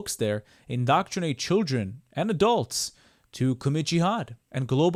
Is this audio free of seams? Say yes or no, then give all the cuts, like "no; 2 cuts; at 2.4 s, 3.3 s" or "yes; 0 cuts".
yes; 0 cuts